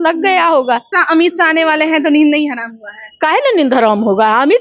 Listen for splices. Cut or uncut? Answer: cut